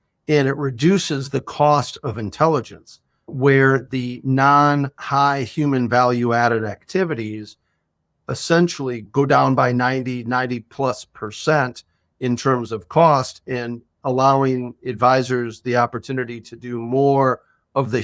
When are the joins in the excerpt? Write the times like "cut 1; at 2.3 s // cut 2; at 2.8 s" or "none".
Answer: none